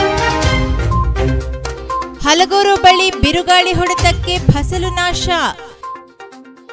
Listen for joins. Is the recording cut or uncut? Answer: uncut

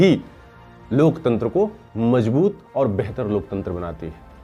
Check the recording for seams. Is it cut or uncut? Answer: uncut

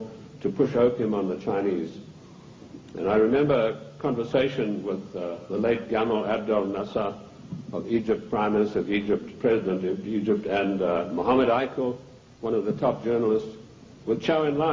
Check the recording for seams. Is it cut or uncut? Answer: cut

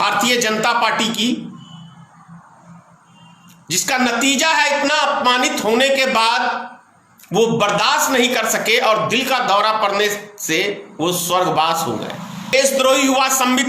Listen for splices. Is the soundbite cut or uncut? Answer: cut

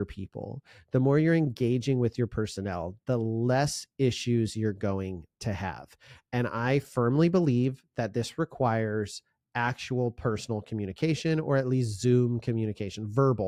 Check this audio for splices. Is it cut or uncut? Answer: uncut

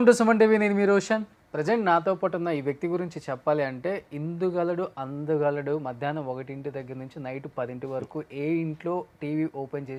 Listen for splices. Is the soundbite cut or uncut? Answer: uncut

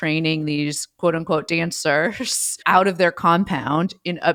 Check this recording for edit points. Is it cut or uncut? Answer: uncut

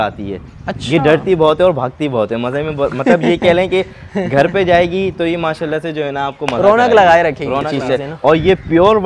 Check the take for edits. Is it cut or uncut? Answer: cut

